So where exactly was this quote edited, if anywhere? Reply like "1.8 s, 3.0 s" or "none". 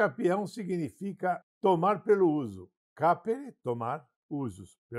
1.5 s, 4.1 s